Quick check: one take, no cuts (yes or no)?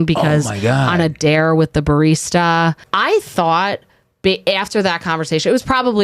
no